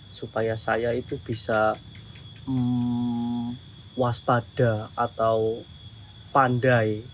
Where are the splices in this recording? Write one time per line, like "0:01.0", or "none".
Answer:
none